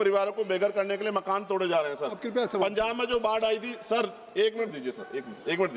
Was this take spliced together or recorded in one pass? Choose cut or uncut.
uncut